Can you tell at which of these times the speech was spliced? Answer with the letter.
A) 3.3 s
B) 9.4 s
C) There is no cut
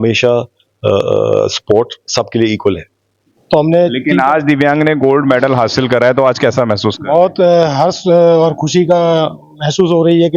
A